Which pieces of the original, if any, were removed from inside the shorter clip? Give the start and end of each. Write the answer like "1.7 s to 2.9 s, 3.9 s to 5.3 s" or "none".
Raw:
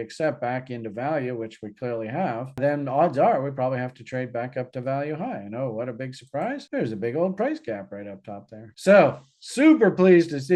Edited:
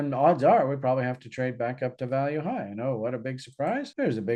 none